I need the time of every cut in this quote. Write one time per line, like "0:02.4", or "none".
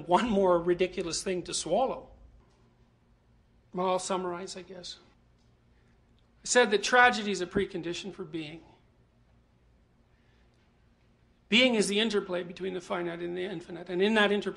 0:08.5

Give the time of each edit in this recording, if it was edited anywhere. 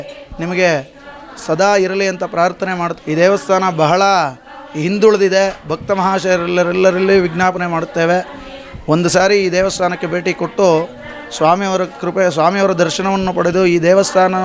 0:02.9

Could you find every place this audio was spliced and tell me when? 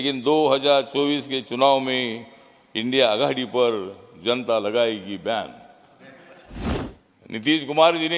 0:06.6

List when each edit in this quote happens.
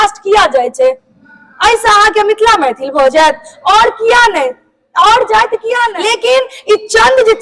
0:05.9

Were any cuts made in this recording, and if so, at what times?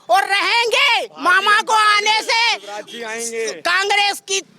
none

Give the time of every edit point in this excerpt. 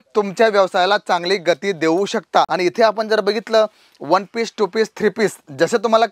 0:02.5

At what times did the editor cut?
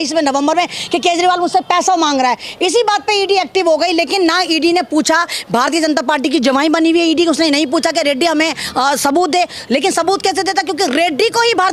none

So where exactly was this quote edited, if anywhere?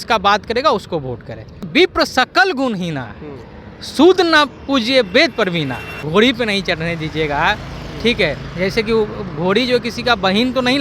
0:01.7
0:05.9

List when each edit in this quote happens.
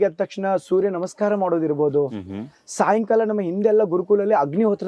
none

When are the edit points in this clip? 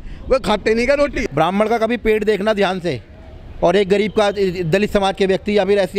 0:01.2

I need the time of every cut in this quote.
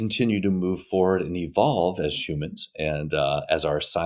none

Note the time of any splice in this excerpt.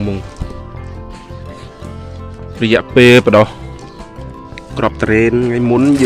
none

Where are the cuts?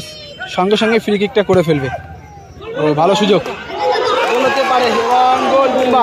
none

